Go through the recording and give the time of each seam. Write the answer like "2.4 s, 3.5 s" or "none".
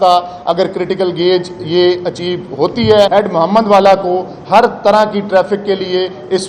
3.1 s